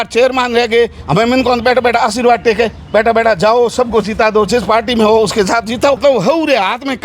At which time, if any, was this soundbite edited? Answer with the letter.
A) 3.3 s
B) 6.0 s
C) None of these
B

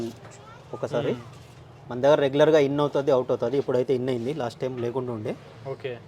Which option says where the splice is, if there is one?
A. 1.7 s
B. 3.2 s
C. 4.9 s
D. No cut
D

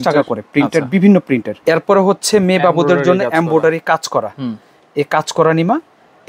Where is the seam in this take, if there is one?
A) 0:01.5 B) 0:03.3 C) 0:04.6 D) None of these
A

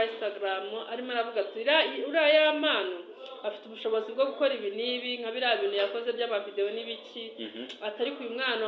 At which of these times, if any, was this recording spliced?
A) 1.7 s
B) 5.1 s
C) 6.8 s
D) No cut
D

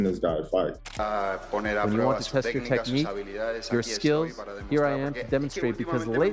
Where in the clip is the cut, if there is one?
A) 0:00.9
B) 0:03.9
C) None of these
A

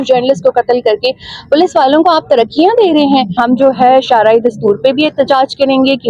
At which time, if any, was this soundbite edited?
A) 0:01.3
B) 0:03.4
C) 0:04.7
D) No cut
B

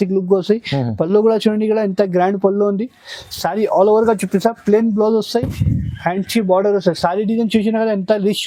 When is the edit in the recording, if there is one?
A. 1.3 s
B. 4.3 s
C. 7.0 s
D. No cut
D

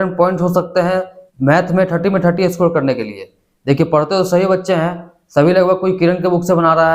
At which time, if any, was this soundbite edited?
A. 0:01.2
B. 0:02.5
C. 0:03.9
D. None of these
A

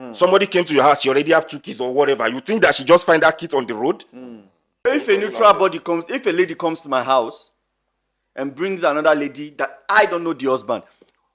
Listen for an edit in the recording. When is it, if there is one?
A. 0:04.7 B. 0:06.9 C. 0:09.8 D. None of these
A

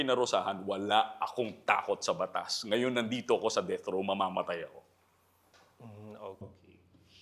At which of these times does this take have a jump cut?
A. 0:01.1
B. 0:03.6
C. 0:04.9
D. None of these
D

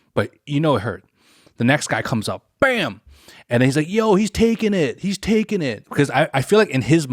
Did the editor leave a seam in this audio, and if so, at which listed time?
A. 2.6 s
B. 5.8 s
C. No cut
B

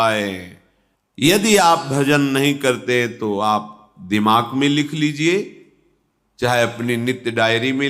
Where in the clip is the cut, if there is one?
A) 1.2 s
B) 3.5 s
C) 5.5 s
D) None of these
A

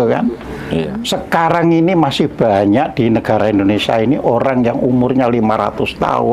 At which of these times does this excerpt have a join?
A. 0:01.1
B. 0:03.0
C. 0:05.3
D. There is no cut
A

